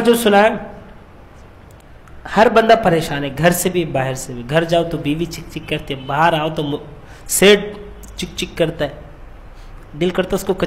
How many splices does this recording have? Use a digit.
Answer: 1